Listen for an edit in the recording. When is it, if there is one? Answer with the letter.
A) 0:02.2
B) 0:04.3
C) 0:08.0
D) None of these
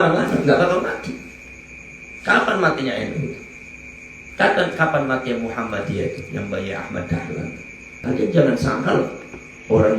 C